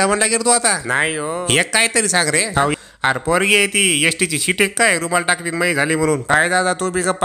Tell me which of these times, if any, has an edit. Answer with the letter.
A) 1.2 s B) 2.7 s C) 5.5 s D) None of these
B